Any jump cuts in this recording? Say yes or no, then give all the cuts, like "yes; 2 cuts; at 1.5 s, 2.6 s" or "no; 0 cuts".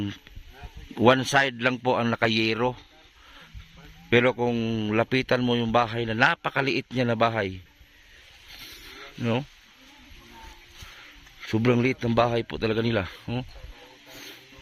no; 0 cuts